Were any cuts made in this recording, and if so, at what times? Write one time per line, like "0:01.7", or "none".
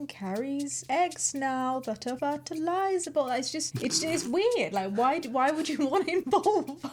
none